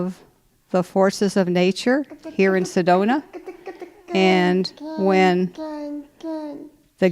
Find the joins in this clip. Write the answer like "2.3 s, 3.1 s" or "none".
2.8 s